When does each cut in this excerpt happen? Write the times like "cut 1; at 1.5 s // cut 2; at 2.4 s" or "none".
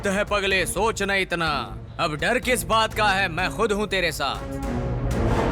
cut 1; at 4.5 s